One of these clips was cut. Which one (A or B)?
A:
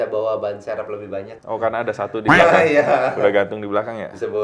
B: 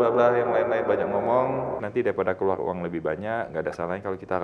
B